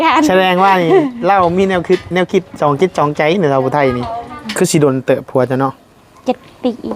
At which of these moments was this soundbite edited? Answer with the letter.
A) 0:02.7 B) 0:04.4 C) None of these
B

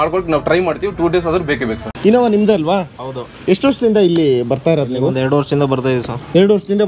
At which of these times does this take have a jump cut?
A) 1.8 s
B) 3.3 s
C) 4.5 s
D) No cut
A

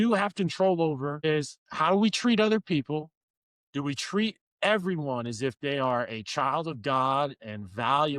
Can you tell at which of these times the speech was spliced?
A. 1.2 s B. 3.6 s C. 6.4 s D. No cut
A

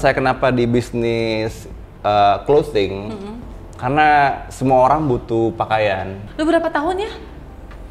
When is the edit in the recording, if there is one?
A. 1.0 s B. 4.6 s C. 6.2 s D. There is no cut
C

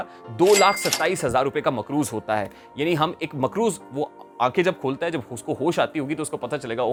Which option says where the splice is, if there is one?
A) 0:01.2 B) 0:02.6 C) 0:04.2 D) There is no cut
D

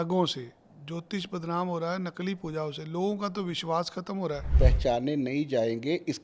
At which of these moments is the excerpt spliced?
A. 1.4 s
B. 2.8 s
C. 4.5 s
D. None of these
C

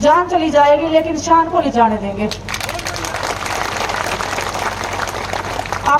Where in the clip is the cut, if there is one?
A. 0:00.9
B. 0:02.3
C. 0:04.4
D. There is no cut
D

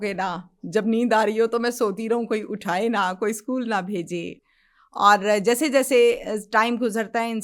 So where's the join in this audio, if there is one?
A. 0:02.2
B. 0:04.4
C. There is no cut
C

